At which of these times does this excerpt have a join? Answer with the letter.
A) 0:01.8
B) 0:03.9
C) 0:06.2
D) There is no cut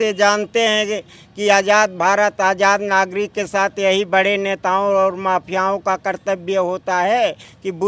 D